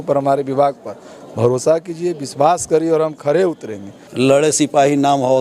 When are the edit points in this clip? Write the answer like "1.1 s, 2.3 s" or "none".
4.0 s